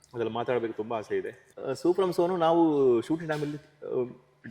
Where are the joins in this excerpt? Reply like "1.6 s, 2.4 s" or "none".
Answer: 1.4 s